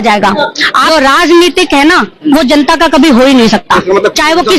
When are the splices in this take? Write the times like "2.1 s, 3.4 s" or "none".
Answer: 0.9 s